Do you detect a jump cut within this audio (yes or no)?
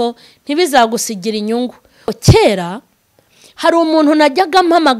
yes